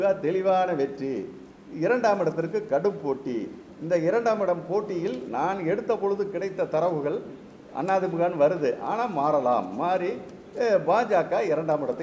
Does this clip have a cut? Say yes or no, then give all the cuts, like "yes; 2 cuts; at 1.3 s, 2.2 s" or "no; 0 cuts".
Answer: no; 0 cuts